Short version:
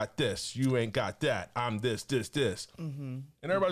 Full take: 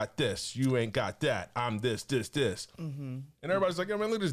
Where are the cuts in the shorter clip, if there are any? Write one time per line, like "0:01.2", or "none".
none